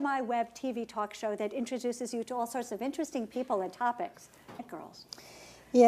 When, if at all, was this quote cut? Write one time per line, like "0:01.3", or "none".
none

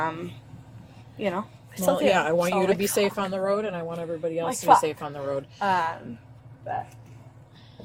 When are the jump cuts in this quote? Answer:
none

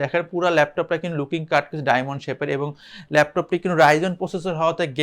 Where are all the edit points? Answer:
none

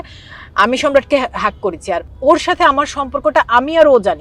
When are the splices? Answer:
0:02.1

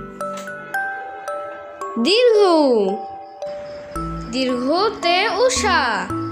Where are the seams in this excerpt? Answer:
0:01.5

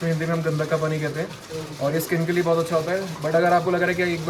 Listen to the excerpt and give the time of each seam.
none

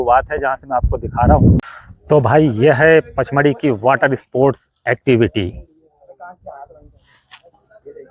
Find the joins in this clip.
0:01.6

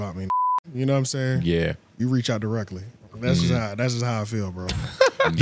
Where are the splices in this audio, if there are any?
none

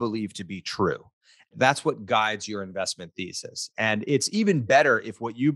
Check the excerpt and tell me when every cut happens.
0:01.5

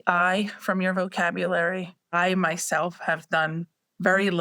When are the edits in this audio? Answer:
0:01.9

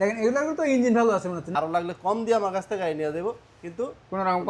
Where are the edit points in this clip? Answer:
0:01.4

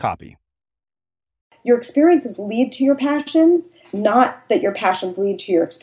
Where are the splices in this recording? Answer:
0:01.5

